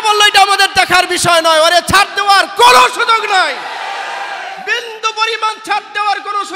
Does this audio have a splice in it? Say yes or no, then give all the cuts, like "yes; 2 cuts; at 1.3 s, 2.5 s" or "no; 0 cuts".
no; 0 cuts